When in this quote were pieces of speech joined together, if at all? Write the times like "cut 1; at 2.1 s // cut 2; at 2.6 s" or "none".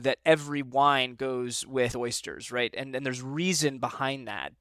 cut 1; at 1.9 s